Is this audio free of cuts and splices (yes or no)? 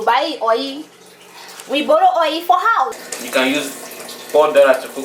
no